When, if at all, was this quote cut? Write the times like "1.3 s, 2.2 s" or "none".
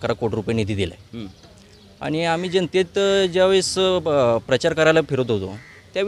none